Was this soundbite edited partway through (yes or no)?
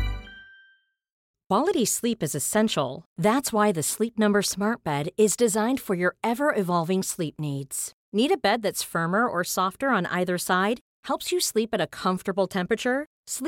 yes